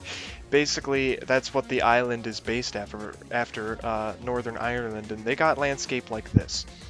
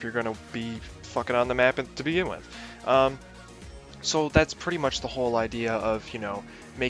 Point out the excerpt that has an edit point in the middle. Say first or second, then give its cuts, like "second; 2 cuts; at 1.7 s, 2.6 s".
first; 1 cut; at 5.8 s